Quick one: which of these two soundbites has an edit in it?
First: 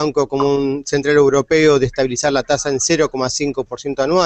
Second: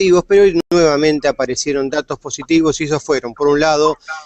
second; 1 cut; at 1.0 s

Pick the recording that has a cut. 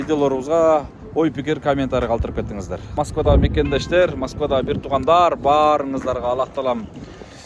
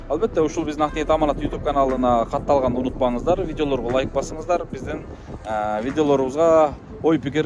first; 1 cut; at 2.9 s

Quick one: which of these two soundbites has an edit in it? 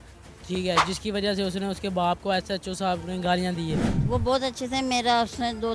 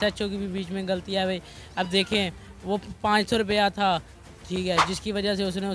first; 1 cut; at 3.9 s

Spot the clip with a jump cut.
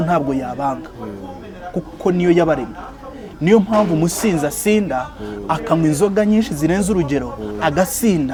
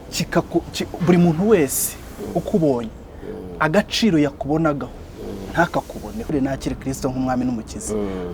second; 1 cut; at 6.3 s

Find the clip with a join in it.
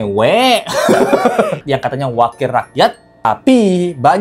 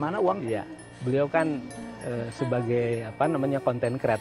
first; 1 cut; at 1.6 s

